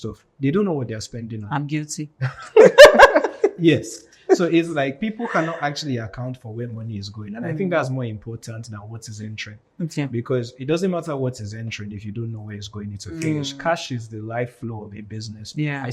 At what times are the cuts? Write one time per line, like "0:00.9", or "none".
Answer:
none